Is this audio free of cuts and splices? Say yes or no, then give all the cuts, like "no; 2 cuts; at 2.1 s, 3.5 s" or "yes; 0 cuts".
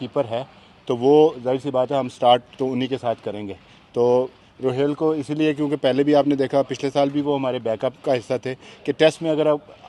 yes; 0 cuts